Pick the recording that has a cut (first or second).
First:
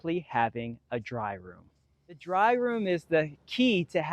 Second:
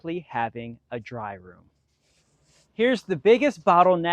first